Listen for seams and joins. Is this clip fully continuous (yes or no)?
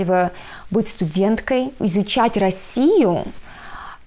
no